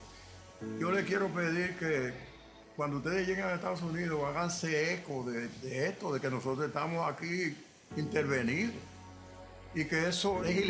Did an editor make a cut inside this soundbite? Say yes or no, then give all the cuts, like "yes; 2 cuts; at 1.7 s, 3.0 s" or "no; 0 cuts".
no; 0 cuts